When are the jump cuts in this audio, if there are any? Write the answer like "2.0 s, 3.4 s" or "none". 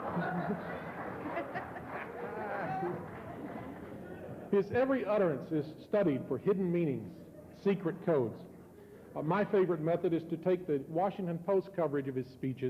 5.7 s